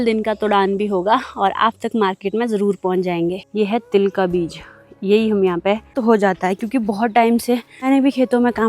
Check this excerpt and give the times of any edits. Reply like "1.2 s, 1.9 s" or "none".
3.4 s, 6.0 s, 7.9 s